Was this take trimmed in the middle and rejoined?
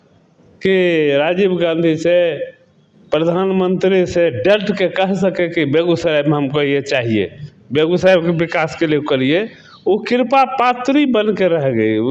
no; 0 cuts

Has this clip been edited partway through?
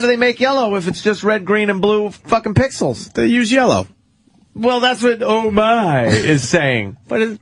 yes; 1 cut; at 3.2 s

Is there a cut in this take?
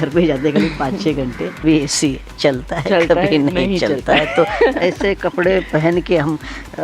yes; 1 cut; at 1.6 s

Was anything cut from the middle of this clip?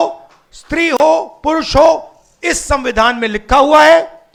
no; 0 cuts

